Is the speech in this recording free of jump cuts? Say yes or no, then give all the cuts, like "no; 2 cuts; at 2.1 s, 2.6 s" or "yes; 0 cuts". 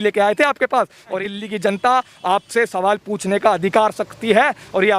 no; 1 cut; at 1.2 s